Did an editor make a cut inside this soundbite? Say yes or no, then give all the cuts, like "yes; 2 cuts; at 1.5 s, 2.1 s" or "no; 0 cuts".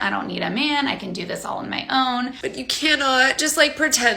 yes; 1 cut; at 2.4 s